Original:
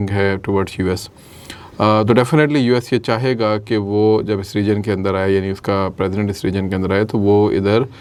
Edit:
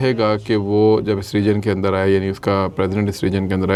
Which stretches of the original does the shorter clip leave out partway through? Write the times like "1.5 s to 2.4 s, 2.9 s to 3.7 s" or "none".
none